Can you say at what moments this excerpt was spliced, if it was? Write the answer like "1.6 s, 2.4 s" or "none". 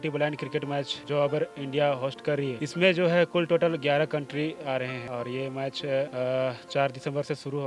1.0 s, 2.6 s, 5.0 s, 6.1 s